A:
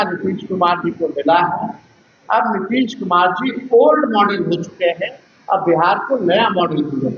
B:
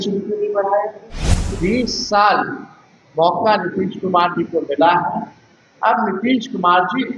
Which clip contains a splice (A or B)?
B